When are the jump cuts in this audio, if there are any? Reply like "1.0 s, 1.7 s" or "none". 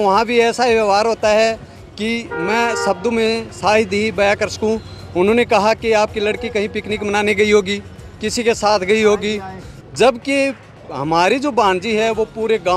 none

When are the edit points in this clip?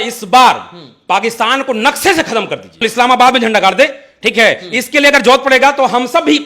2.8 s

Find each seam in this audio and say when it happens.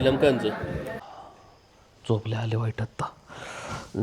1.1 s

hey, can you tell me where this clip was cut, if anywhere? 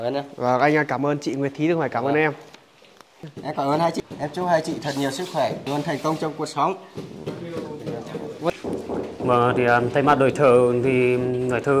4.0 s, 8.5 s

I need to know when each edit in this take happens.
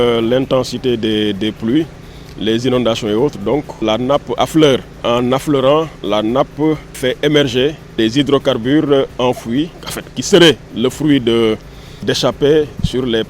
3.8 s, 5.0 s, 7.0 s, 8.0 s

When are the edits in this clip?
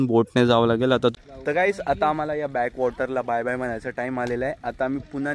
1.2 s

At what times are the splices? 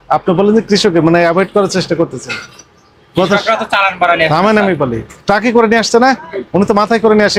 none

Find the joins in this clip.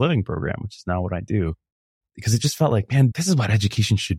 2.0 s, 3.1 s

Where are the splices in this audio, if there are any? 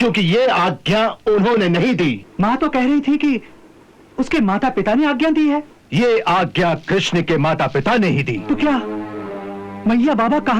2.2 s, 5.8 s, 8.4 s

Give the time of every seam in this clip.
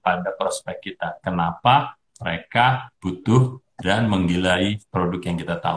2.9 s, 4.8 s

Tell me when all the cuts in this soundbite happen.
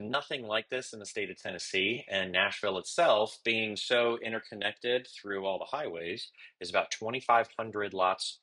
none

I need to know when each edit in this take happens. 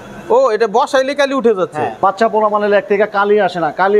1.9 s

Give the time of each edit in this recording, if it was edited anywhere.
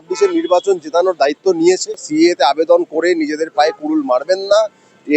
2.0 s

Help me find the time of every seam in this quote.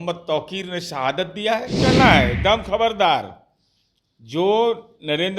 1.9 s

